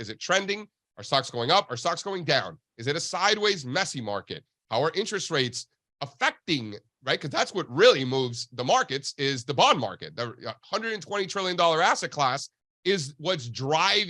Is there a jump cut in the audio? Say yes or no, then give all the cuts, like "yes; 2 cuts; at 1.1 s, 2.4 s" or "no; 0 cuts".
no; 0 cuts